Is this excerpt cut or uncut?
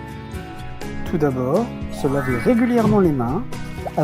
cut